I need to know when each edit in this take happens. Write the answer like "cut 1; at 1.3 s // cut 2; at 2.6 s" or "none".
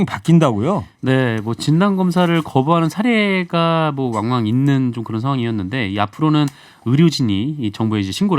none

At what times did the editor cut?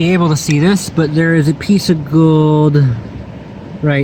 none

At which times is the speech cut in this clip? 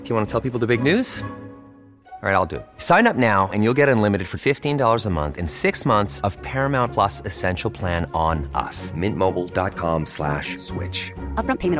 none

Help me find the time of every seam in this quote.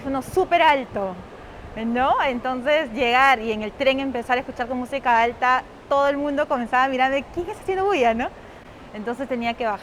none

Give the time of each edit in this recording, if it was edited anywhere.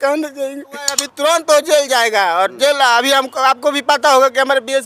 cut 1; at 1.1 s

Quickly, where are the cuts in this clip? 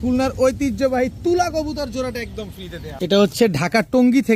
cut 1; at 2.8 s

